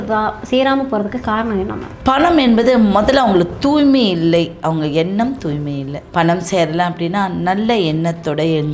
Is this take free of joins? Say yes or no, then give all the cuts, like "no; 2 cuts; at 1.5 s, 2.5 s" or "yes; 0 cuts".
no; 2 cuts; at 1.9 s, 6.0 s